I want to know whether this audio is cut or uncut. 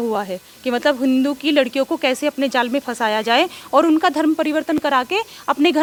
uncut